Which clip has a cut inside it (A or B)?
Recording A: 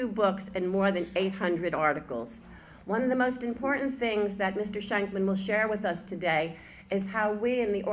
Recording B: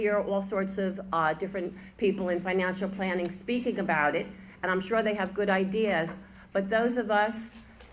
A